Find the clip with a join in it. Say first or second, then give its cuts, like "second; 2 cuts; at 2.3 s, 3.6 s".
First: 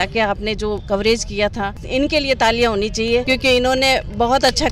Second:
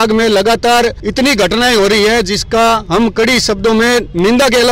first; 1 cut; at 1.7 s